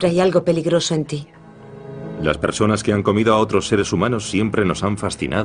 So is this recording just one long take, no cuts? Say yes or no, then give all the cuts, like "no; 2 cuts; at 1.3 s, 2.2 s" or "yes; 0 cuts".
no; 1 cut; at 4.2 s